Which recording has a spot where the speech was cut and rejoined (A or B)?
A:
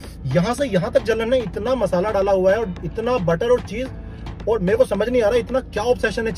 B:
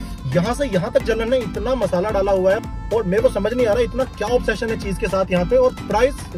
B